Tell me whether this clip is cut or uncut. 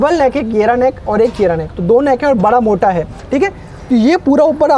uncut